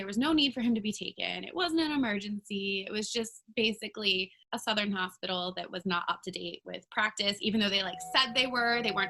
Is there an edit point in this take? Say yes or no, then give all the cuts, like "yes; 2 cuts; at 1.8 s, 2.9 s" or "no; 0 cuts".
yes; 1 cut; at 4.4 s